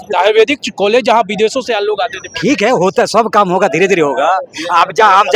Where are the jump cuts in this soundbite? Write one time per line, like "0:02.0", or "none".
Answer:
none